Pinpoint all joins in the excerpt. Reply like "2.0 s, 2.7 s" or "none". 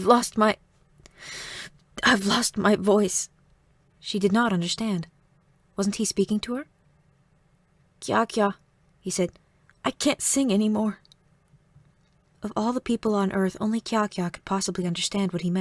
none